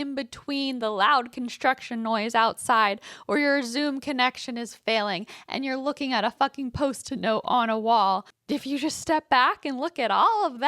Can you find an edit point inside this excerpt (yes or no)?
yes